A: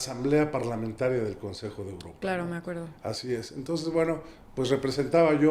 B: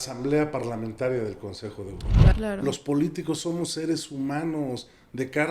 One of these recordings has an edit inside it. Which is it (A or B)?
B